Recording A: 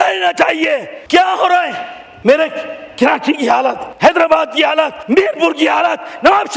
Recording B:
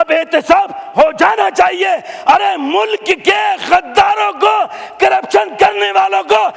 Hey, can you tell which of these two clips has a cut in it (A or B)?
A